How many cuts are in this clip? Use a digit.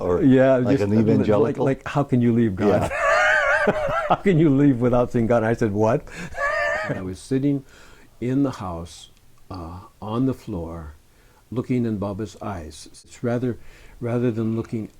2